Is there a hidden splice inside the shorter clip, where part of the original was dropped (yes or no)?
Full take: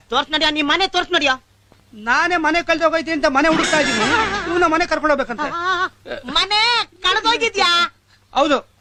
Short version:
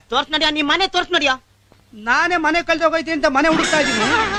no